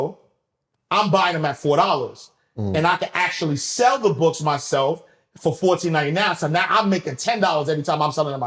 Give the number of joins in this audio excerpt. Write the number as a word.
zero